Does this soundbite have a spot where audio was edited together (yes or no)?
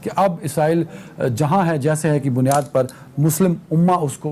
no